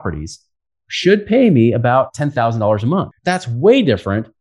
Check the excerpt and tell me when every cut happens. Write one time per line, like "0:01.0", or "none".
0:03.1

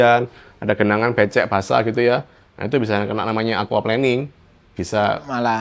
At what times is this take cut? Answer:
none

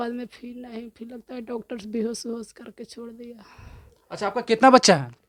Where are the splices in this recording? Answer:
none

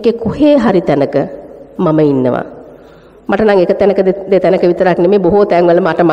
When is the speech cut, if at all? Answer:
none

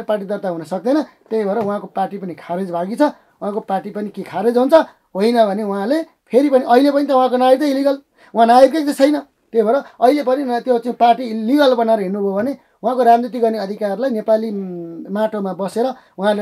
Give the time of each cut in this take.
none

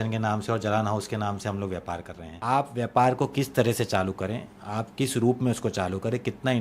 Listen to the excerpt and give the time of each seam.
0:02.4

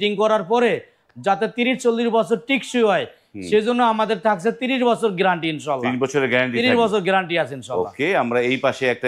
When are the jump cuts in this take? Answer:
none

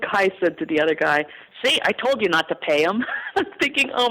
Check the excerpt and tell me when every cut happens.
none

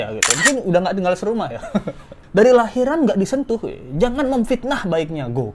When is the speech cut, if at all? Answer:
none

